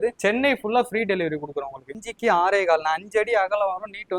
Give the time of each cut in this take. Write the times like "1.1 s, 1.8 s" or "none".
1.9 s